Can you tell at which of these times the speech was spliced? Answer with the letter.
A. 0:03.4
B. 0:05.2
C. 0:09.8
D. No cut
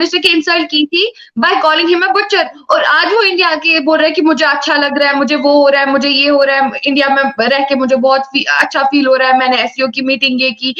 D